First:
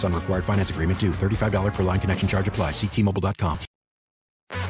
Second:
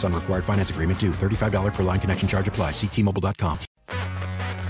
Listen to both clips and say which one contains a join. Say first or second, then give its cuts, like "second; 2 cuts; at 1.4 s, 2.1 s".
second; 1 cut; at 3.7 s